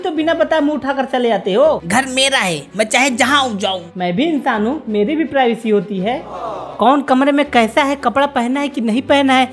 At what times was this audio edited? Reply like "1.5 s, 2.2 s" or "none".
none